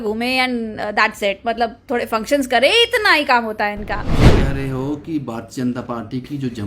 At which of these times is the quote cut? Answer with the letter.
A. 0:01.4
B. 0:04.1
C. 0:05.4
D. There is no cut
B